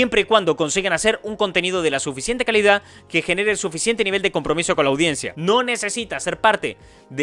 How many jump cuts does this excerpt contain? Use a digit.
1